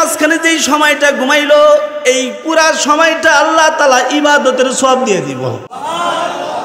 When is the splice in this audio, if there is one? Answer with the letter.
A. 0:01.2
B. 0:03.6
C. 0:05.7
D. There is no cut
C